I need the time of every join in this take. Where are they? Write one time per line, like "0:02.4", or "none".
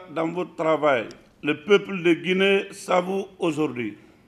none